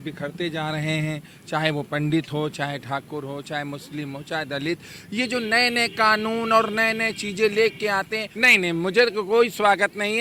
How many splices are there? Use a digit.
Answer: 1